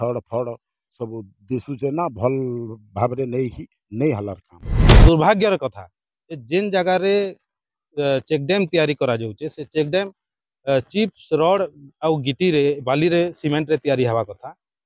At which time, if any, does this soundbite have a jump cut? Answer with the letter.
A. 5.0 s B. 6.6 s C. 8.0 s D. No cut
A